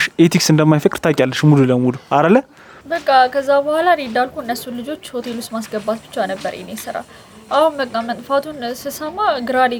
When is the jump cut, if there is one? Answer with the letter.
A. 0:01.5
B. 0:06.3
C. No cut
C